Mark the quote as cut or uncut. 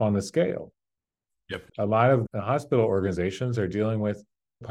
cut